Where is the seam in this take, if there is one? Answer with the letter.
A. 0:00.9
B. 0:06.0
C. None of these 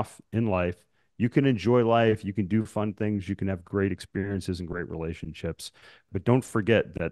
B